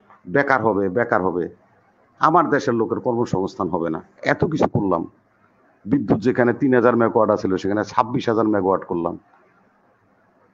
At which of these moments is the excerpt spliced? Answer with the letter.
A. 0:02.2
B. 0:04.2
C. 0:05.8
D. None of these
B